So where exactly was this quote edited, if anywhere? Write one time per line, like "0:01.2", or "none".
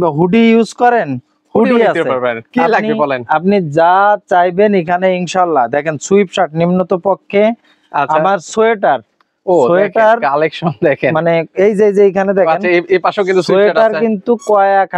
none